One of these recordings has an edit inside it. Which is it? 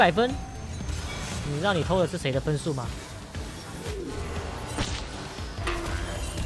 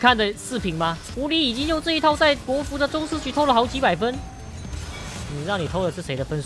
second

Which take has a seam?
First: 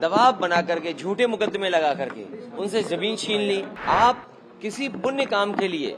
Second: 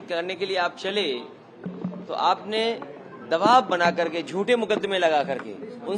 first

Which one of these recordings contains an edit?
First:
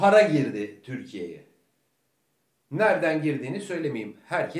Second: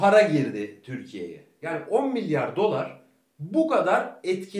second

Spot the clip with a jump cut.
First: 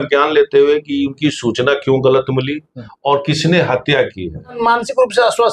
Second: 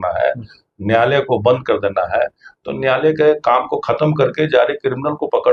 first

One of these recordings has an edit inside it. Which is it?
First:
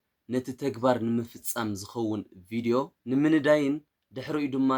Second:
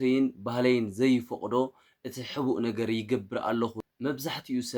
second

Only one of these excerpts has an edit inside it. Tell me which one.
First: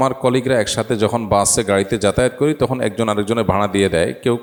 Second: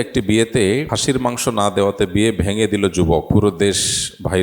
second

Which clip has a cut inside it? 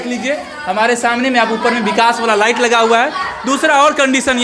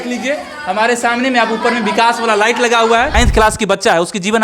second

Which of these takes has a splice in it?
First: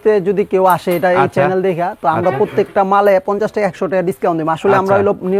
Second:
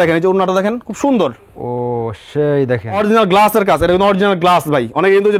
second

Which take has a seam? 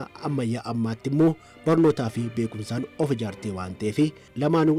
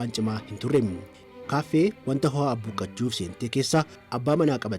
second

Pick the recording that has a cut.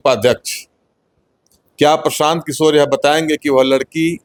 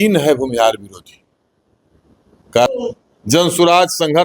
second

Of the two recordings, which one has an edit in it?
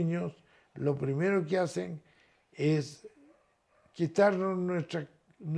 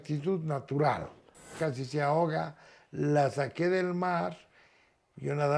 second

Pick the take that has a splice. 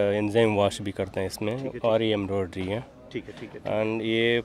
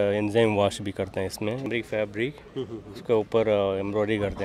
second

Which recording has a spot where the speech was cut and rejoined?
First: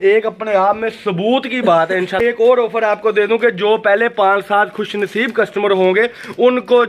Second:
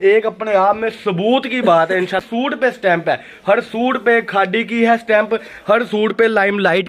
first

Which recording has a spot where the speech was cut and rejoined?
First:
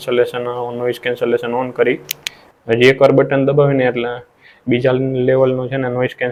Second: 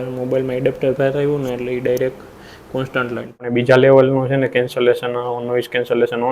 second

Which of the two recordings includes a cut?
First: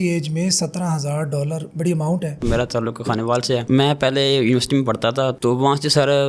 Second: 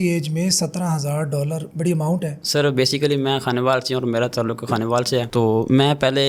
first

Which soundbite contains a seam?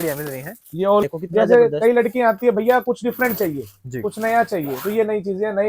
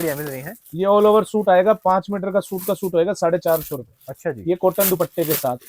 first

